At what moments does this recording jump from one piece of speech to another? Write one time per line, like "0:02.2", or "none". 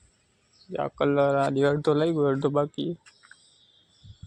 none